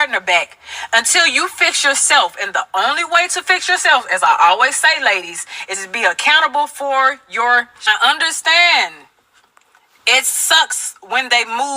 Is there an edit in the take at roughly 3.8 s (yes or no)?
no